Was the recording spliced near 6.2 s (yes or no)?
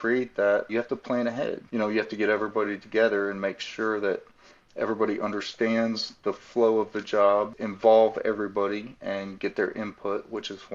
no